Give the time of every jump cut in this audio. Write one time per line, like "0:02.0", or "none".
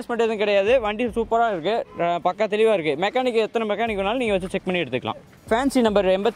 0:05.3